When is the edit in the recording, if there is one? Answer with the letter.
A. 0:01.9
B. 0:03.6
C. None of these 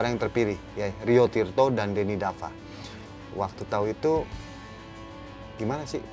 C